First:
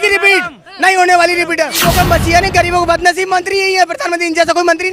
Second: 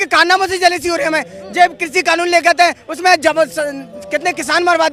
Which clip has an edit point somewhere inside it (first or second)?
first